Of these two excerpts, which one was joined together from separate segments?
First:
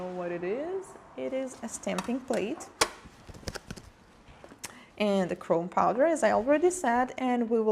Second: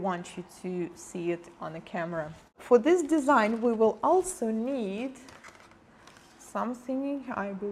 first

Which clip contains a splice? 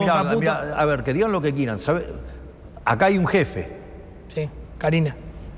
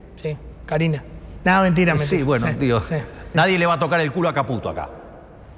second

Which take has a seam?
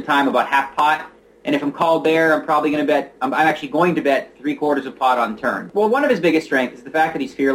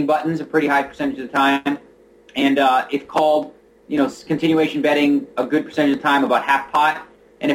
first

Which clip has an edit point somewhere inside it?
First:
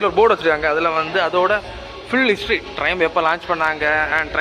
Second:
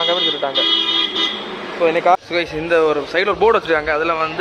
second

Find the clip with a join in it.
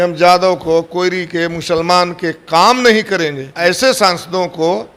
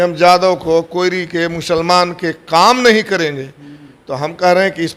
first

